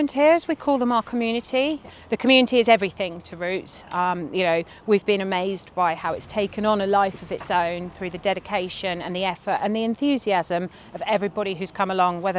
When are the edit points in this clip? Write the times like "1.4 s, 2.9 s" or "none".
1.8 s